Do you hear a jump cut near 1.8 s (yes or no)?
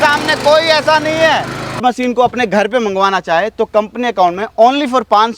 yes